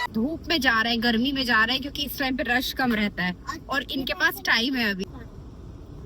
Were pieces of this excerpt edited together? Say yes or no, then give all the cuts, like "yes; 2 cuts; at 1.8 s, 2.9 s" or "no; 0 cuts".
yes; 1 cut; at 5.0 s